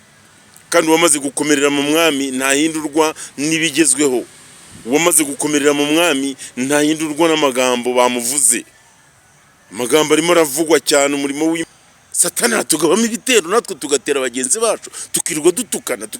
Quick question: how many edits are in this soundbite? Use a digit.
1